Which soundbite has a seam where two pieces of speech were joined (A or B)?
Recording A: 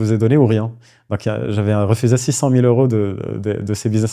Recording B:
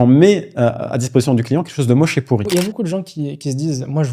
B